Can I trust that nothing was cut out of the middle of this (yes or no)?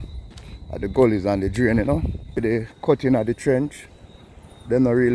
no